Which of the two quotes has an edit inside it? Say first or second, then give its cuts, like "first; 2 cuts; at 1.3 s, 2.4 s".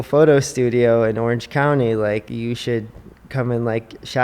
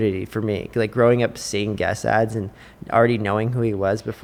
first; 1 cut; at 2.3 s